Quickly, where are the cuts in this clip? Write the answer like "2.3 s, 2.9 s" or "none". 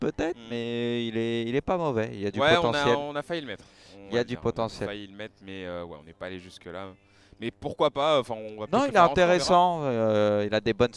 none

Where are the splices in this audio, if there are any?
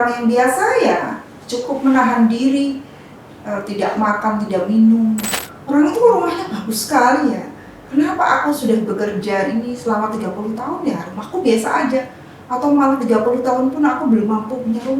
5.3 s

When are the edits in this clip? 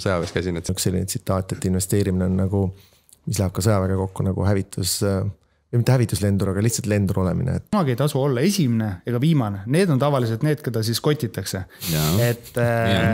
0.7 s, 7.7 s

